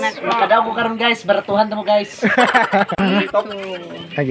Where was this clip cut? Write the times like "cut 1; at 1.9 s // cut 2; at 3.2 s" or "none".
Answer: cut 1; at 3.0 s